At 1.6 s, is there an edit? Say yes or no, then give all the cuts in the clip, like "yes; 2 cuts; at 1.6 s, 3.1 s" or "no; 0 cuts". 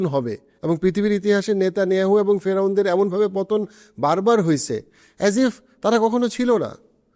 no; 0 cuts